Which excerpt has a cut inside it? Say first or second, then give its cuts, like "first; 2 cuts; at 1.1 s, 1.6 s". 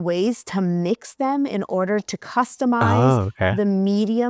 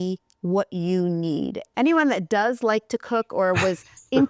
second; 1 cut; at 1.6 s